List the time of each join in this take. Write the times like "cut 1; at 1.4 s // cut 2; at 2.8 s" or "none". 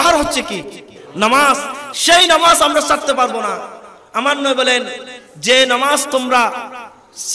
cut 1; at 1.0 s

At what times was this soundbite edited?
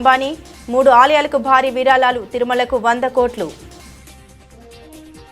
cut 1; at 3.6 s

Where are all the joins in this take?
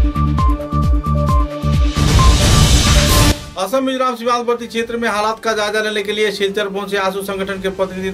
cut 1; at 3.4 s

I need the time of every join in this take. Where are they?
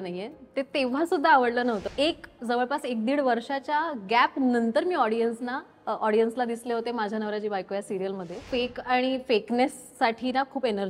cut 1; at 2.2 s // cut 2; at 8.5 s

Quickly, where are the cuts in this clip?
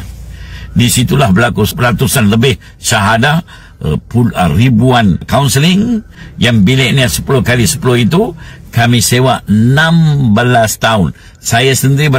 cut 1; at 1.7 s // cut 2; at 5.3 s // cut 3; at 6.2 s

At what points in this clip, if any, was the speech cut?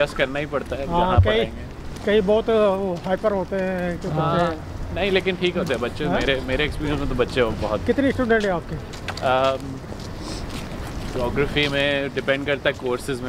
none

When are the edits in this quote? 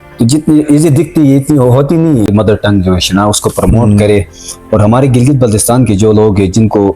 cut 1; at 2.3 s

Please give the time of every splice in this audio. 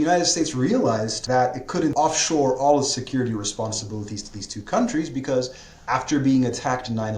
cut 1; at 1.2 s // cut 2; at 1.9 s

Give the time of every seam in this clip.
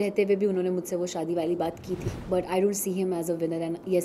cut 1; at 2.1 s

